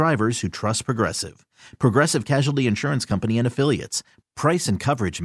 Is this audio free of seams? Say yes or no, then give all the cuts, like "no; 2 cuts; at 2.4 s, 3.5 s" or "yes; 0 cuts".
yes; 0 cuts